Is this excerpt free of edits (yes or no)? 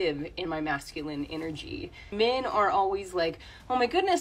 no